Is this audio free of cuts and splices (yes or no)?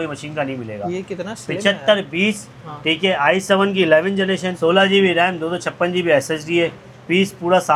yes